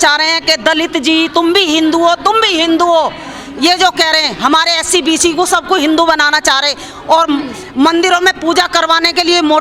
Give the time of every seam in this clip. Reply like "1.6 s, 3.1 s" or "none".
none